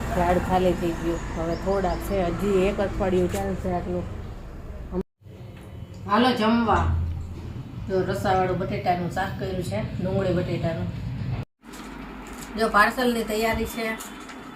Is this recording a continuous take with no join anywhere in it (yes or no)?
no